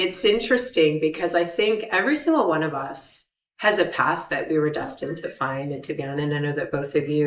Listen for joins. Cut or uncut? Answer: uncut